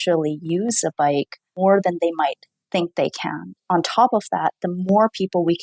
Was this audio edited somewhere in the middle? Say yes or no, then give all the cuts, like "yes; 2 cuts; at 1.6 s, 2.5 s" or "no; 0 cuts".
yes; 2 cuts; at 1.4 s, 3.6 s